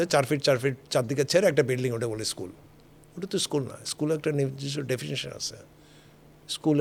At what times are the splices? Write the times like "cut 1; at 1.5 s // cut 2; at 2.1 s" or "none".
none